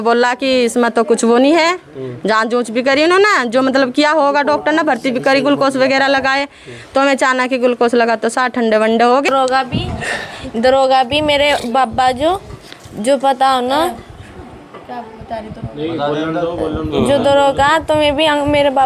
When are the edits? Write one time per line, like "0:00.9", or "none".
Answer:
0:09.3